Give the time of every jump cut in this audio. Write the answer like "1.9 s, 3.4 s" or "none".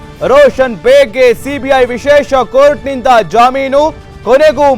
none